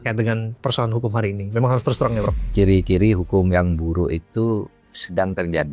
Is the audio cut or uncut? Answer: cut